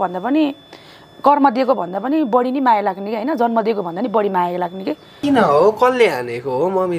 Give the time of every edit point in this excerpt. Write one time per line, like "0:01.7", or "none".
0:05.2